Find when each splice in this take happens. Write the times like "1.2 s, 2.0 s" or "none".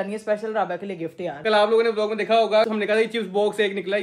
1.4 s, 2.7 s